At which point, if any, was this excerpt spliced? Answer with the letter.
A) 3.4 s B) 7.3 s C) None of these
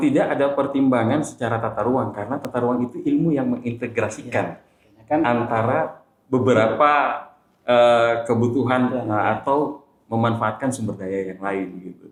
C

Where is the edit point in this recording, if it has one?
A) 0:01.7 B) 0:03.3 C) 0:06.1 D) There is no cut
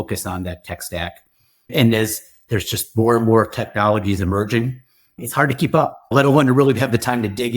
C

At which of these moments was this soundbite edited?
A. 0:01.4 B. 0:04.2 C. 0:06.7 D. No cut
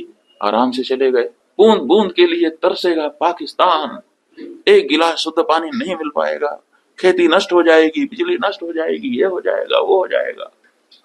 A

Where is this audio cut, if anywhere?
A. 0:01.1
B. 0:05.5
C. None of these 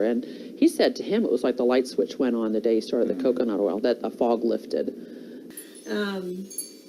B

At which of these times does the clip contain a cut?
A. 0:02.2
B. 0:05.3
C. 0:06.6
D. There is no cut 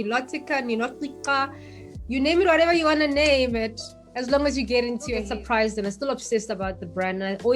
B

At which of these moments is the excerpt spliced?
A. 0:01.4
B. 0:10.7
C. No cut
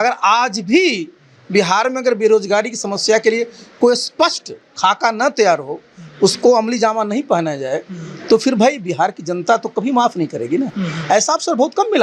C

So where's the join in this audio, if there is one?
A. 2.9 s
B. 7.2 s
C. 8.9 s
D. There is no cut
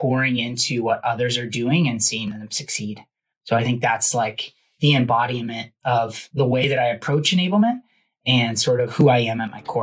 C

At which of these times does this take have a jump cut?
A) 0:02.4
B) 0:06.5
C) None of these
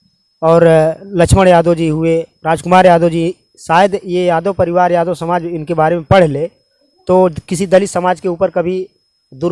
C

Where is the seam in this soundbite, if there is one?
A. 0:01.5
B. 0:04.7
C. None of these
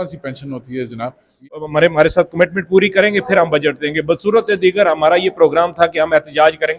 A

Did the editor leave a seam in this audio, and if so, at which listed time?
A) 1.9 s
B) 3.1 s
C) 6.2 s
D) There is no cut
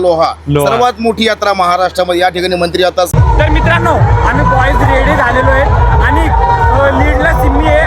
B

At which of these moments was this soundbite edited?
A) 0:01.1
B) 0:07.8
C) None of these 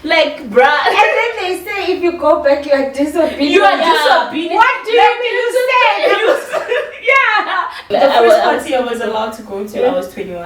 B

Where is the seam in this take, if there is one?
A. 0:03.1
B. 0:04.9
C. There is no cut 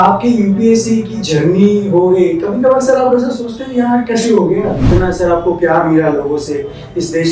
B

